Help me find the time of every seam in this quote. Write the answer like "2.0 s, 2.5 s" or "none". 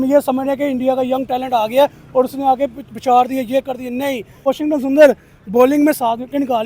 4.4 s